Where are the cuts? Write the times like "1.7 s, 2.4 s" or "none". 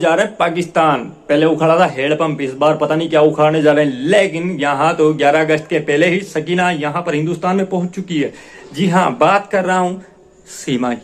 none

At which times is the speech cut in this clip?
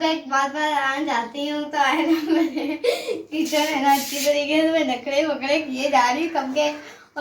none

